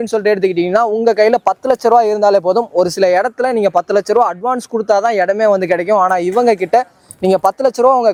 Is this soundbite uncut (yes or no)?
yes